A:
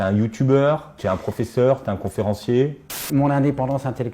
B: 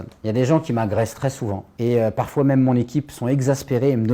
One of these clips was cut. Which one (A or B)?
A